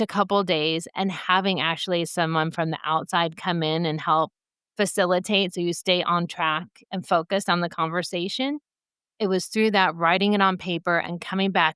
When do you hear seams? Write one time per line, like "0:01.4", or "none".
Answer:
none